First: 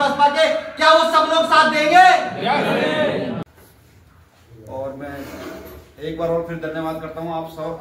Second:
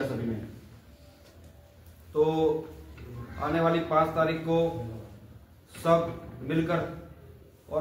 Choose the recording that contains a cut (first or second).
first